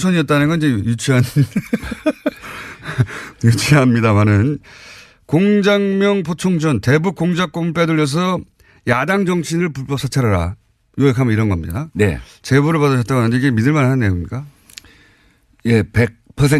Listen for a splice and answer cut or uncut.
uncut